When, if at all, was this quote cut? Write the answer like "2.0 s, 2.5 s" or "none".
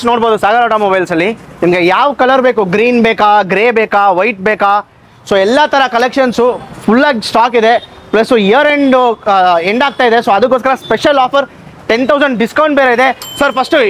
none